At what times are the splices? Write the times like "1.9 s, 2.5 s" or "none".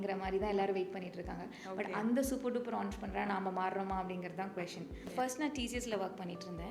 5.0 s

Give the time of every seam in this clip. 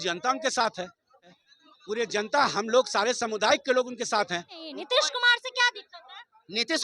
1.5 s, 4.7 s

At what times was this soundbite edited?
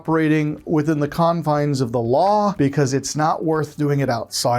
2.5 s

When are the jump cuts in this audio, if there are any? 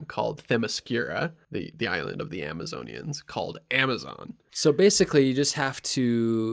1.4 s, 4.4 s

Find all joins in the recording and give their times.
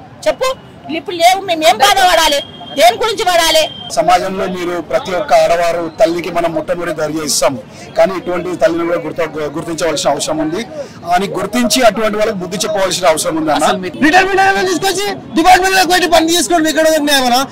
3.8 s, 13.9 s

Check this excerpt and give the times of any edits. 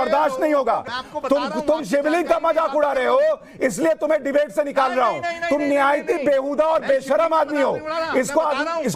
1.0 s

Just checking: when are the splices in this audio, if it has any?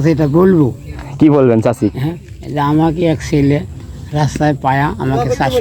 none

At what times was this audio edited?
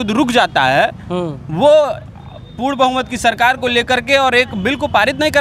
none

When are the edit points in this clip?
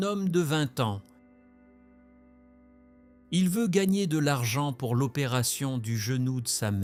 none

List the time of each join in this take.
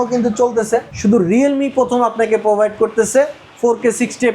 0.9 s

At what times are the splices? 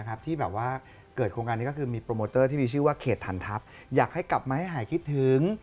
3.8 s

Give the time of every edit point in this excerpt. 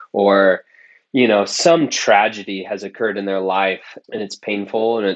3.9 s

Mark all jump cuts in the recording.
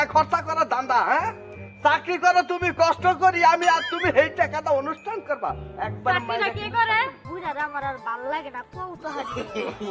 7.2 s

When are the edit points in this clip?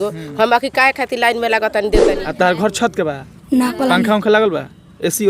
2.2 s

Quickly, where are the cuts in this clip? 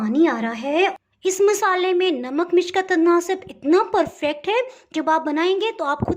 1.0 s

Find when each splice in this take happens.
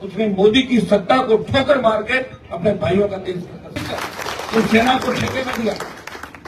none

